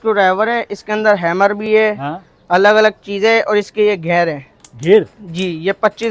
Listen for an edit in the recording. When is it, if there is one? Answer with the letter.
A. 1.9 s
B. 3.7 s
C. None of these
C